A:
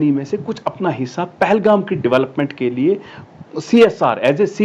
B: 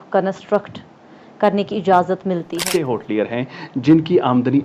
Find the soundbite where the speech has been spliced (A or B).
B